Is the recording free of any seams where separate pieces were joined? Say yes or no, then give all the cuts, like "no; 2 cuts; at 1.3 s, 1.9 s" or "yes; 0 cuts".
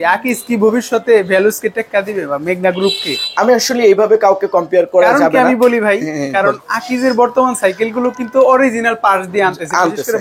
yes; 0 cuts